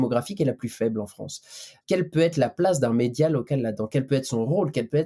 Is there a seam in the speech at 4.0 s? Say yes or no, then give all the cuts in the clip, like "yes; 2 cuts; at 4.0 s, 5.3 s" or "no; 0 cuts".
no; 1 cut; at 1.8 s